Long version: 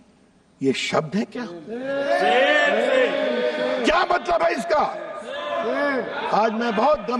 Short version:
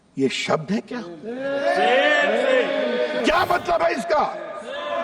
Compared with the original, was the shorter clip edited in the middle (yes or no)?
yes